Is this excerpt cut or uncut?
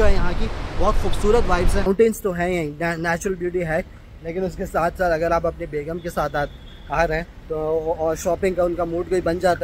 cut